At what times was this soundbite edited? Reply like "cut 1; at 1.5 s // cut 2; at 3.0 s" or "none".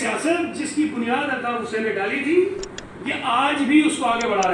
none